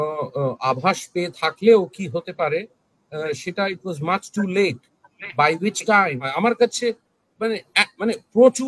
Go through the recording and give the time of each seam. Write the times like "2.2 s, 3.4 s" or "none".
6.3 s